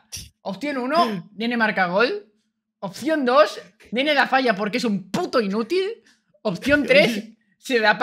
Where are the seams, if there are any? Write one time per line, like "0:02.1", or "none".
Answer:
none